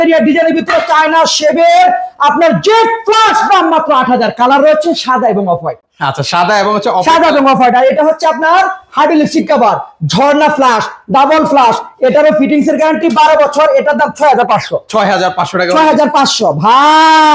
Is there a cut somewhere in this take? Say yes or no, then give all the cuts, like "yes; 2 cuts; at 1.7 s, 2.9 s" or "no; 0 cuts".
no; 0 cuts